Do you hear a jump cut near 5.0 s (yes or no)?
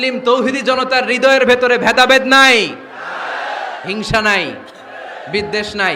no